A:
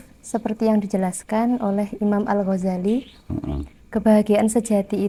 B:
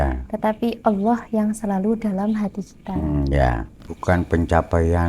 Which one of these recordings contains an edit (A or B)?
B